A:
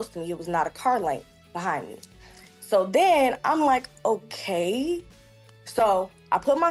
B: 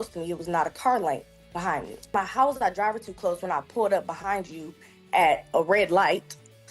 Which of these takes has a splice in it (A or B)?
B